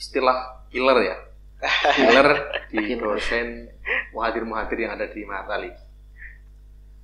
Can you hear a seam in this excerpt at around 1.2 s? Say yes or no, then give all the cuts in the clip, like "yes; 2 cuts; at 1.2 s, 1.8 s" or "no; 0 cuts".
no; 0 cuts